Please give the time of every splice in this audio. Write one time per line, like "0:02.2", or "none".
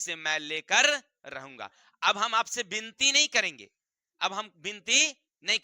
none